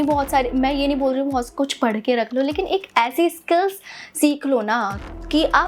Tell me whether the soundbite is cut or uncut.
uncut